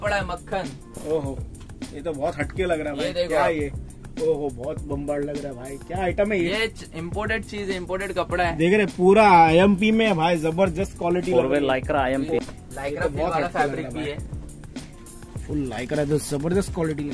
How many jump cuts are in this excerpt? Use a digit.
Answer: 1